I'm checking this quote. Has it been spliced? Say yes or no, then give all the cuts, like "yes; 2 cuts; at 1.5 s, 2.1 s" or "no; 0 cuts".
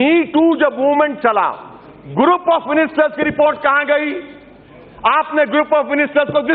no; 0 cuts